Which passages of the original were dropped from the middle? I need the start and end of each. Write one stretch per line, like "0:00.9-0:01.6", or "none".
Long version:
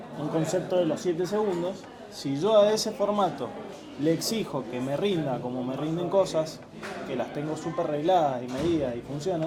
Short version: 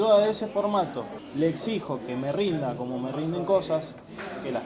0:03.6-0:03.8